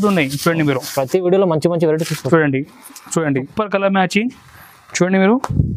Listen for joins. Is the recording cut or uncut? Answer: cut